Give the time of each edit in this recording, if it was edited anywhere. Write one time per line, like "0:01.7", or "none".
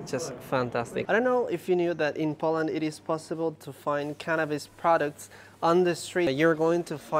0:01.0
0:06.3